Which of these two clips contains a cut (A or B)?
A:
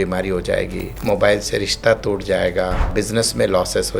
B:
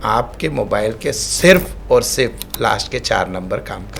A